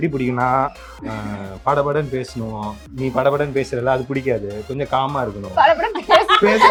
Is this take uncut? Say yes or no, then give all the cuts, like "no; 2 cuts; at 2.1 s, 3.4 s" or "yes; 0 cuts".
yes; 0 cuts